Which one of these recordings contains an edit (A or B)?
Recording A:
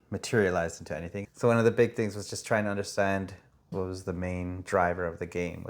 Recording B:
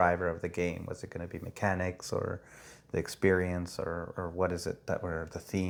A